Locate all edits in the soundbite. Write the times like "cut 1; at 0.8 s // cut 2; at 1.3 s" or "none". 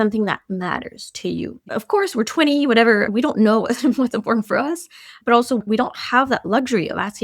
cut 1; at 1.7 s